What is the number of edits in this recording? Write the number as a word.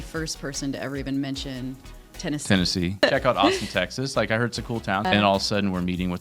two